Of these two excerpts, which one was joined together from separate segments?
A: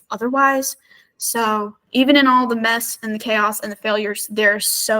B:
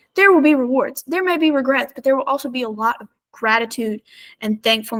A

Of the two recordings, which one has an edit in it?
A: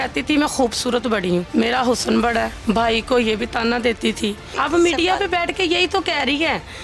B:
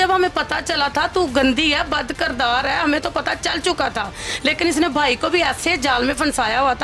A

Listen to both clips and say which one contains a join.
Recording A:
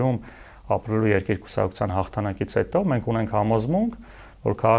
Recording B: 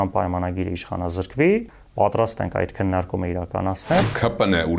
B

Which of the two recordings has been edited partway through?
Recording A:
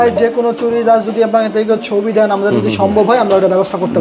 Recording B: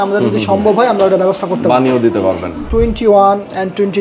B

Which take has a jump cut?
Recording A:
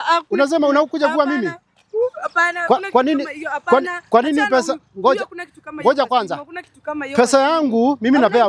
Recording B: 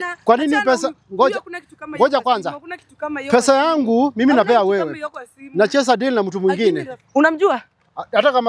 B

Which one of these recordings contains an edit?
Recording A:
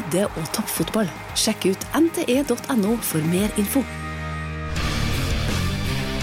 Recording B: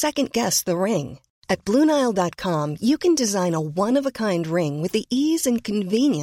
A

